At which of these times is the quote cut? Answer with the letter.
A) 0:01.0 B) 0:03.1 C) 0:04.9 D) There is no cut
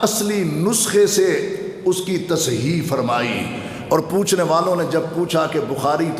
D